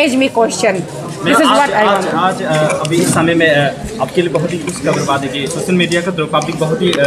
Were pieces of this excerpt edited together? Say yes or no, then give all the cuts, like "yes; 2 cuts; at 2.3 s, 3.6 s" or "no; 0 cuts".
no; 0 cuts